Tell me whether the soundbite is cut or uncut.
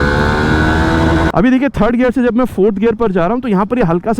cut